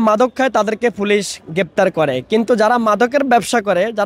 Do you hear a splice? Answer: no; 0 cuts

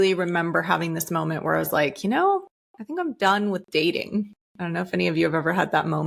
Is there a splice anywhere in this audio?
no; 0 cuts

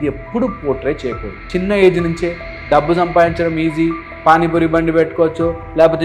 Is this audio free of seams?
no; 1 cut; at 1.4 s

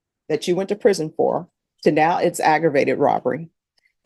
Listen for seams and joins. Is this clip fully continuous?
yes; 0 cuts

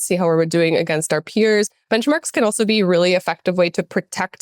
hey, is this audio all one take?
yes; 0 cuts

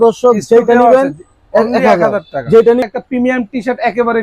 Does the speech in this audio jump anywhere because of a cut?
yes; 1 cut; at 2.8 s

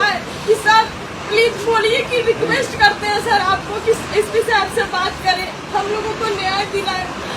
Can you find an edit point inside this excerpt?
no; 0 cuts

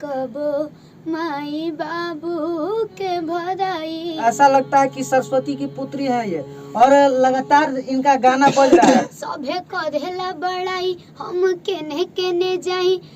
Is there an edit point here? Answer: yes; 2 cuts; at 4.2 s, 9.2 s

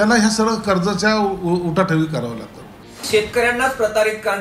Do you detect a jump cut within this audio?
yes; 1 cut; at 3.0 s

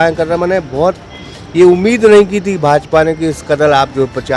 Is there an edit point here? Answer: no; 0 cuts

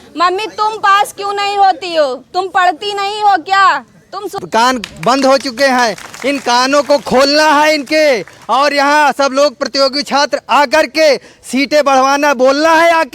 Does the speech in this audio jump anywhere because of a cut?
yes; 1 cut; at 4.2 s

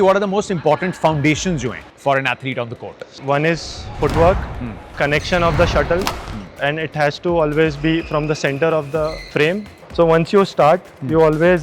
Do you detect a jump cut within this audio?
yes; 4 cuts; at 1.8 s, 3.1 s, 4.9 s, 9.7 s

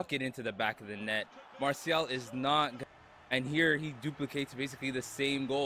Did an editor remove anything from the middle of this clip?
yes; 1 cut; at 2.8 s

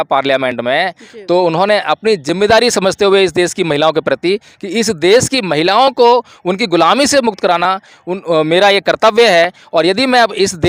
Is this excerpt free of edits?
yes; 0 cuts

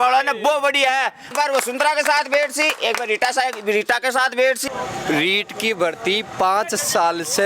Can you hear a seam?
yes; 2 cuts; at 1.3 s, 4.7 s

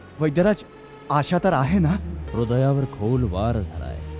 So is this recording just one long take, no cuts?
no; 1 cut; at 2.2 s

